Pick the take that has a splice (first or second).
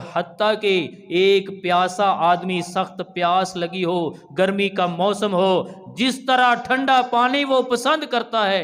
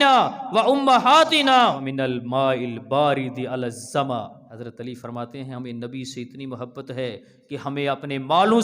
second